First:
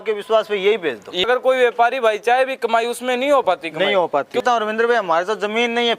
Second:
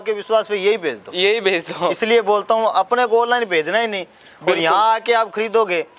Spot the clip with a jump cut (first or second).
first